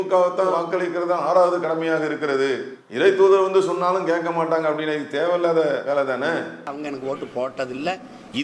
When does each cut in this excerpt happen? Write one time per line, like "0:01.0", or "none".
0:06.7